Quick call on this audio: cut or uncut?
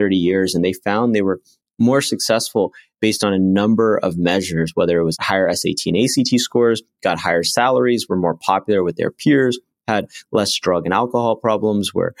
cut